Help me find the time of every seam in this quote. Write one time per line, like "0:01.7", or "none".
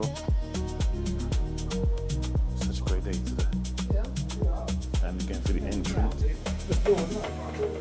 0:06.3